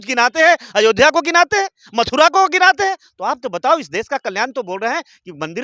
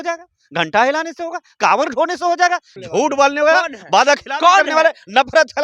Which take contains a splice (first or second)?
second